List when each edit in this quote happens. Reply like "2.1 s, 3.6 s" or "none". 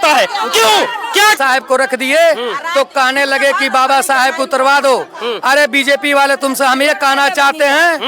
1.4 s